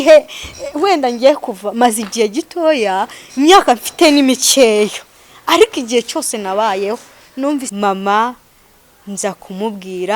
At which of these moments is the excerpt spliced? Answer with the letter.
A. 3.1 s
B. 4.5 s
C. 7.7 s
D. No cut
C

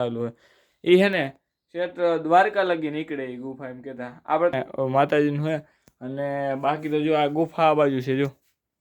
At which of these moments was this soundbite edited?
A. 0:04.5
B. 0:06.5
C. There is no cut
A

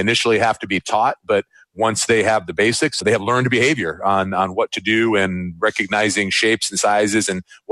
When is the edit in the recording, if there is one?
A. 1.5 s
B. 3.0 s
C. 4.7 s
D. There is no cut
B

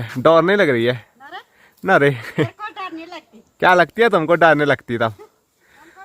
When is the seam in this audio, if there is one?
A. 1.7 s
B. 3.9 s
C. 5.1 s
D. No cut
D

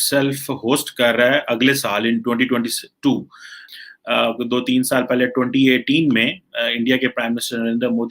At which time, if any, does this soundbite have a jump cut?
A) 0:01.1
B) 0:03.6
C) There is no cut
B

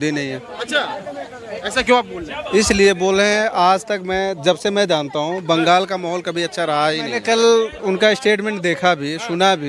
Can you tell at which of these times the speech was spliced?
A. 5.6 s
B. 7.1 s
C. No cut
B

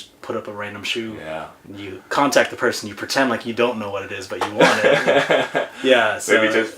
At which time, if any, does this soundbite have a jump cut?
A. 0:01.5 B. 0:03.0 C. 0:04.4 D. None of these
A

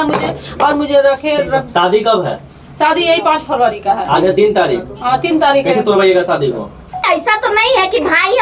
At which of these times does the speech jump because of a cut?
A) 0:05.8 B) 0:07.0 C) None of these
B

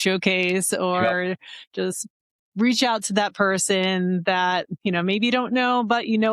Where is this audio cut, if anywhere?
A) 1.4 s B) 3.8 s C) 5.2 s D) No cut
D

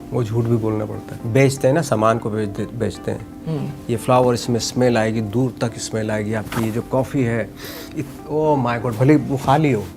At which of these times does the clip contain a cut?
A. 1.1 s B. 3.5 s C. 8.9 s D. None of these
A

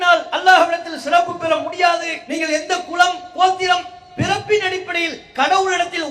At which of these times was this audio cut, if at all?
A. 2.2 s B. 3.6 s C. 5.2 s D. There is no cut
A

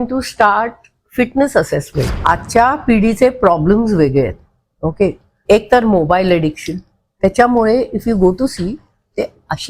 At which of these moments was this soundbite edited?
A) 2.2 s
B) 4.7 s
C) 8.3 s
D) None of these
A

